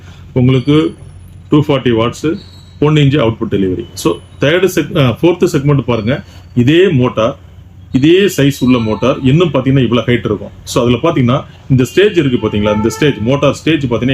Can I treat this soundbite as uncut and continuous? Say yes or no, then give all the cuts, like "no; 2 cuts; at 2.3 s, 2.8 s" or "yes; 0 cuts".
yes; 0 cuts